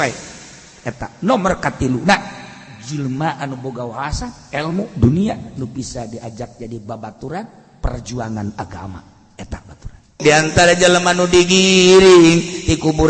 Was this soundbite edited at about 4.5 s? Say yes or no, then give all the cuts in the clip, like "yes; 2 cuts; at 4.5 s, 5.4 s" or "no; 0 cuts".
no; 1 cut; at 10.2 s